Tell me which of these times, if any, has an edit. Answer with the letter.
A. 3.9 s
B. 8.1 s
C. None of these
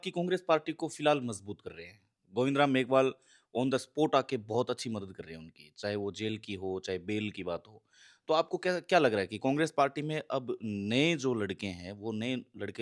C